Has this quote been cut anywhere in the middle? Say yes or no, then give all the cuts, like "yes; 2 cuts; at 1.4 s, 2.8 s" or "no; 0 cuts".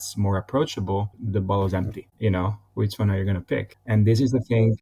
yes; 1 cut; at 2.0 s